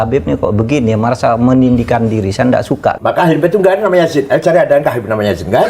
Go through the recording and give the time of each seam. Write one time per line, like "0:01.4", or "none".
0:03.0